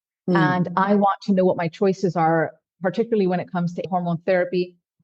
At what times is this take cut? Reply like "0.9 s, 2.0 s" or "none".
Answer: 3.8 s

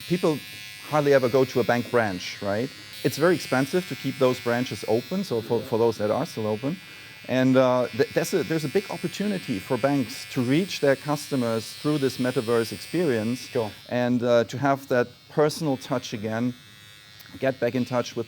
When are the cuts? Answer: 2.9 s

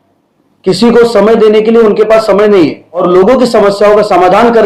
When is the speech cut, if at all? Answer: 3.0 s

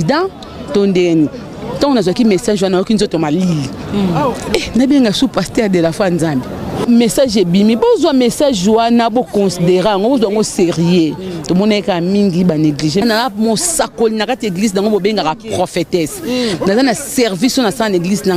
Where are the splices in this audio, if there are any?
6.8 s, 13.0 s

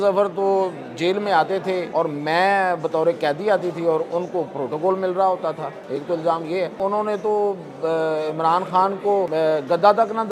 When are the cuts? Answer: 1.9 s, 5.7 s, 6.8 s, 9.3 s

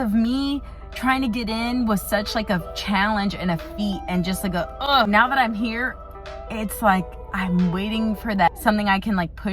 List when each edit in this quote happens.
5.1 s, 8.5 s

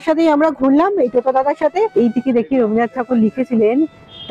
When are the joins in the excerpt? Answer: 1.9 s

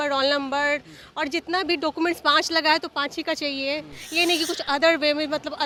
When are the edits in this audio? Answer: none

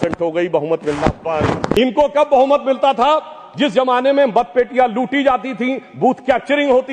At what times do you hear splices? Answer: 1.7 s

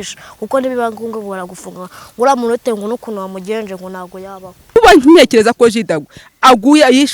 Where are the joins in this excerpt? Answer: 4.7 s

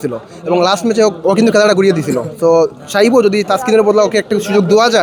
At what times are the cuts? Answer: none

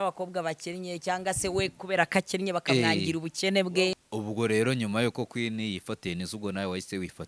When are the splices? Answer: 4.0 s

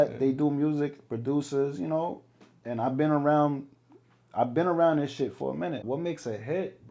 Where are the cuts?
5.8 s

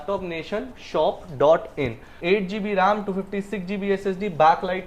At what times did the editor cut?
2.1 s

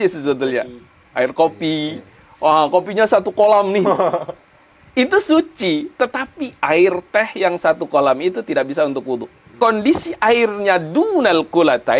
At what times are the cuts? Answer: 9.5 s

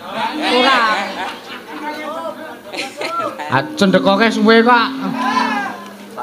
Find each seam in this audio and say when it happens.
none

